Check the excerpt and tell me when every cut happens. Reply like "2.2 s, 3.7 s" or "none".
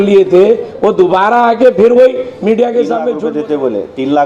3.1 s